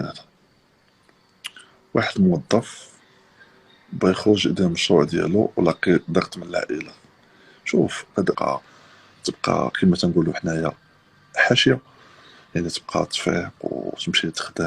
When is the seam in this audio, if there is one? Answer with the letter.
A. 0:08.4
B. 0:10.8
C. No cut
A